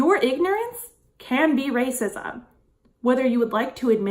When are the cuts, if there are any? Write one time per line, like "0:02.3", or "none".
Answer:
none